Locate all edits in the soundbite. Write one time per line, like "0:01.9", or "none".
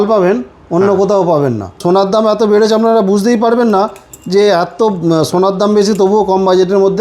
0:01.8